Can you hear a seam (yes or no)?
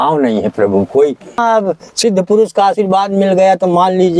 yes